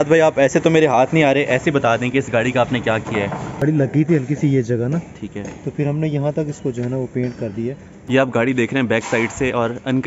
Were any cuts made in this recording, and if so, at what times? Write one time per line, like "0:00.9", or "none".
0:03.6
0:07.9